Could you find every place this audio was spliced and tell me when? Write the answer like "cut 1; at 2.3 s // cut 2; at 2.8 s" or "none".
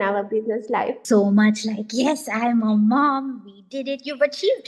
cut 1; at 1.0 s